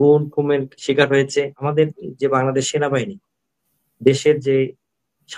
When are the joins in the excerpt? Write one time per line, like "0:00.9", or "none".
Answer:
0:01.6